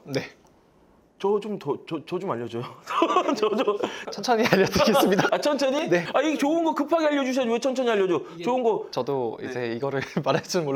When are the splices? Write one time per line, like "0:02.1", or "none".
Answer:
0:03.9
0:08.9